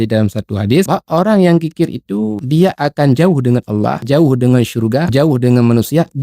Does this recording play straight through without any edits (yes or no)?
no